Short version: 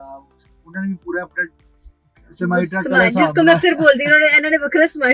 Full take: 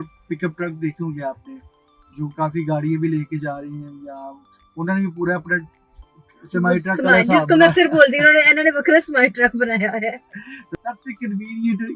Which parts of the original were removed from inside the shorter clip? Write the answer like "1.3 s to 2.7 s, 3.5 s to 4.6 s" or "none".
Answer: none

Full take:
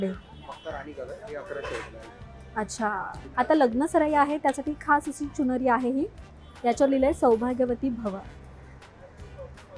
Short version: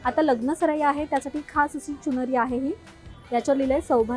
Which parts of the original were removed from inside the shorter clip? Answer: none

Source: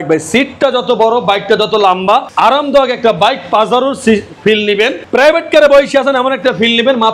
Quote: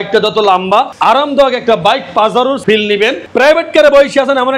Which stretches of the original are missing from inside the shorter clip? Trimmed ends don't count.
4.0 s to 4.4 s

